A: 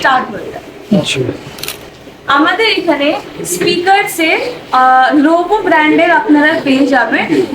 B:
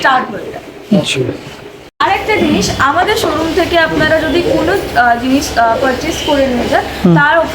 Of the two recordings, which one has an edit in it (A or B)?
B